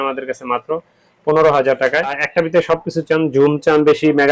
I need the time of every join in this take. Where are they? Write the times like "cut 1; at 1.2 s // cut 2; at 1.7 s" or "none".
cut 1; at 2.2 s